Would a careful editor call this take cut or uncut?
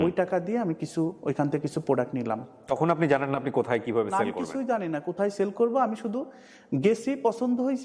uncut